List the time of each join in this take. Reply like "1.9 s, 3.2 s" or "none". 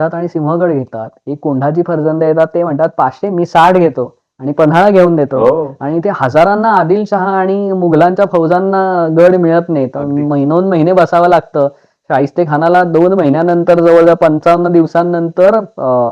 none